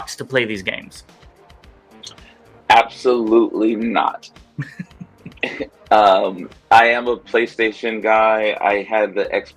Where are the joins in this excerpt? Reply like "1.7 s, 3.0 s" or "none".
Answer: none